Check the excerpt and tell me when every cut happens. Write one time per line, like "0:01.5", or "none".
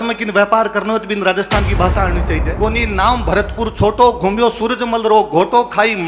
0:02.6